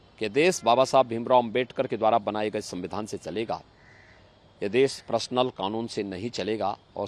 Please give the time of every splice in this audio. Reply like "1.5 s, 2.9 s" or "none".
none